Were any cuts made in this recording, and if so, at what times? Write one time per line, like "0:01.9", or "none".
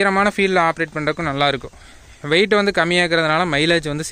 none